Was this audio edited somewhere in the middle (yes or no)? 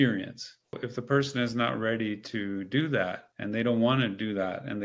yes